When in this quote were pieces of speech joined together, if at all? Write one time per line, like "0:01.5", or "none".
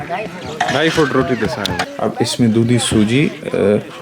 0:01.8